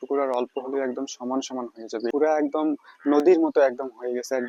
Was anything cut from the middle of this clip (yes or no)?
yes